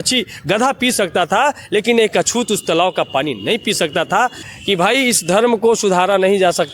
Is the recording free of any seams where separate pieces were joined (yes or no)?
no